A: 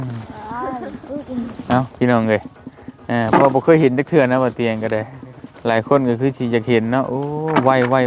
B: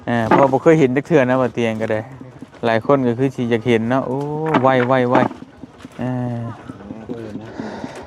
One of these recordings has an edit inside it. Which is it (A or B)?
B